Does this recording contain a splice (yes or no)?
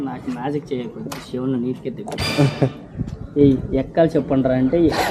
no